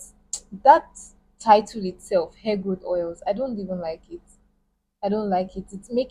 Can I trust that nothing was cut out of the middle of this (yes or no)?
yes